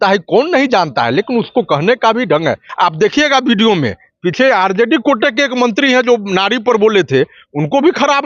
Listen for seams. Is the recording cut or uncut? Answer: cut